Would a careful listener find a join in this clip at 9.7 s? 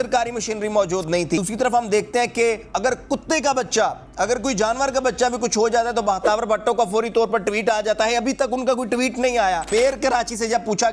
yes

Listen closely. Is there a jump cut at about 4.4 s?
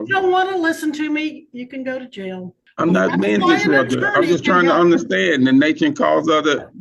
no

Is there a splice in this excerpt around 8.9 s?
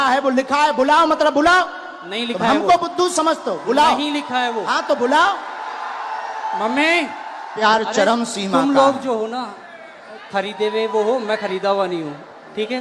no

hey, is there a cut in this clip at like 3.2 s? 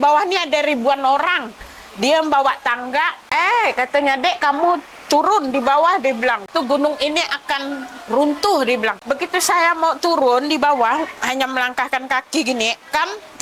yes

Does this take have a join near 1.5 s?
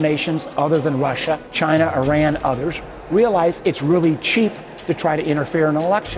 yes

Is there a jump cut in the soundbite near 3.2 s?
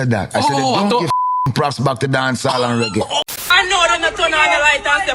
yes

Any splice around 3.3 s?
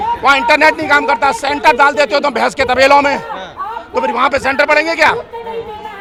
no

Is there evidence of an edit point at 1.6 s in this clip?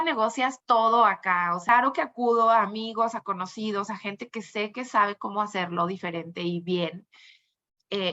yes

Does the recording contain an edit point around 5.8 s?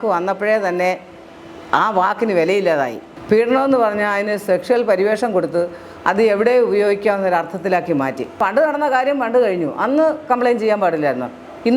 no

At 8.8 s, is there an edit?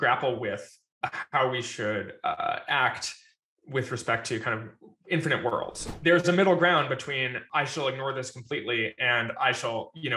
no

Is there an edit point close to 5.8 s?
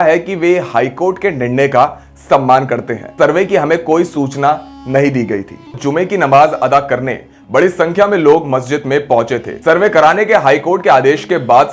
yes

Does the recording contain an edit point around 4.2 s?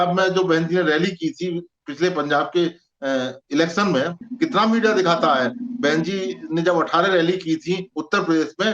yes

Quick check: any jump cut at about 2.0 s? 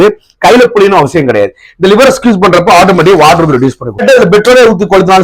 no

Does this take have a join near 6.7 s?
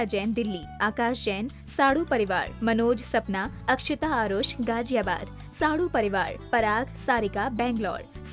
yes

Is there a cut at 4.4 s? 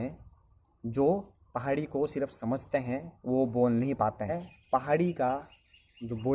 yes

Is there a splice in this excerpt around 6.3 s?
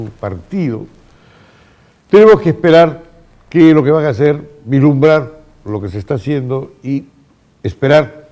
no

